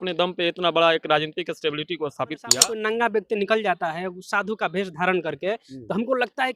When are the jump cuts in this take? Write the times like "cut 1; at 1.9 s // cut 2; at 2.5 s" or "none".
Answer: cut 1; at 2.5 s